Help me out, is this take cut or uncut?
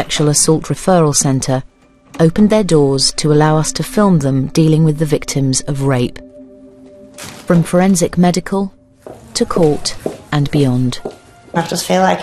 uncut